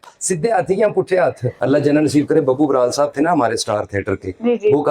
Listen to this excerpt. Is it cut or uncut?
cut